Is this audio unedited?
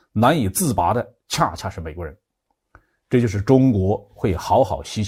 yes; 0 cuts

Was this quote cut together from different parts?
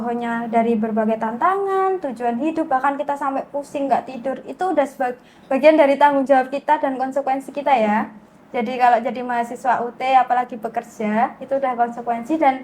no; 0 cuts

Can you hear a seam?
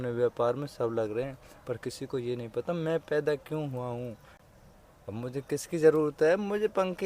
yes; 1 cut; at 4.3 s

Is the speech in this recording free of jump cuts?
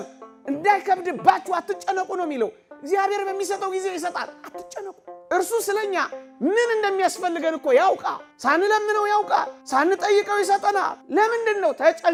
yes; 0 cuts

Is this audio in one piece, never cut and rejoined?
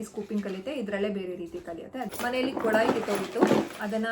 no; 1 cut; at 2.1 s

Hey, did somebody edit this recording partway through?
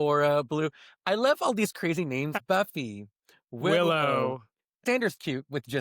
yes; 2 cuts; at 2.3 s, 4.8 s

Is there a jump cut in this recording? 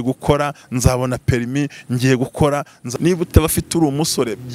yes; 1 cut; at 2.8 s

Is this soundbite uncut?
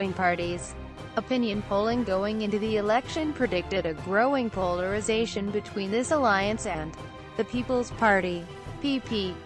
yes; 0 cuts

